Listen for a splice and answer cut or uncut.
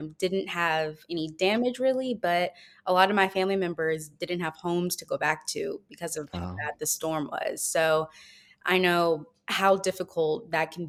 uncut